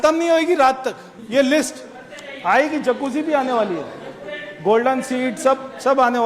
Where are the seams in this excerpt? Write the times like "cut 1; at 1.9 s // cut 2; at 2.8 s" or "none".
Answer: cut 1; at 1.1 s